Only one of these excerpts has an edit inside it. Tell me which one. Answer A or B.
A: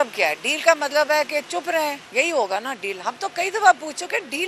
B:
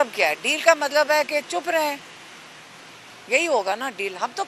A